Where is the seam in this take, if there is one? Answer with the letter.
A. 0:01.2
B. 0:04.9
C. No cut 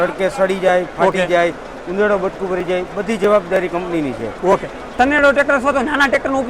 B